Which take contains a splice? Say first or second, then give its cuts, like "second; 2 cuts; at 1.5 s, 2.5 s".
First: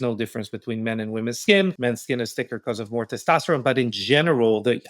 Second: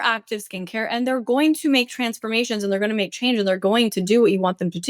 first; 1 cut; at 1.8 s